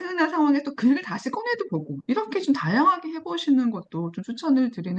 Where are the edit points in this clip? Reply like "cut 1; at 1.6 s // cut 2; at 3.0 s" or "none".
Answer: none